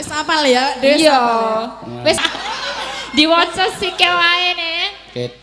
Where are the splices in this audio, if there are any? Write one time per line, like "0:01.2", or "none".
0:02.2